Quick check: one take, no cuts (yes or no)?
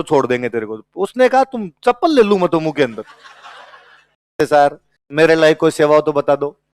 no